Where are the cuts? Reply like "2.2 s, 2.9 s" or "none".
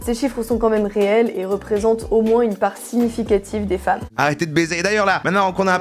4.0 s